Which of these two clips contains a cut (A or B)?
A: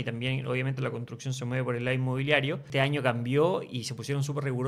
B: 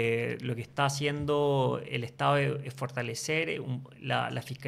A